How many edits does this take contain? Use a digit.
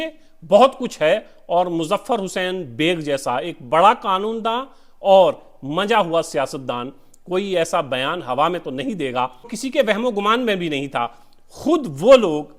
1